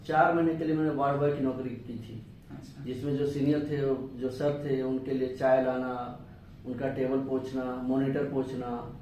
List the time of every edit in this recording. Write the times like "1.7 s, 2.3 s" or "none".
none